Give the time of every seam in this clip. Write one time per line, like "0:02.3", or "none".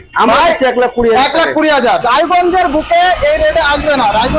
0:02.0